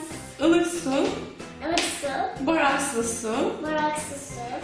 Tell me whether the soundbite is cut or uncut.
cut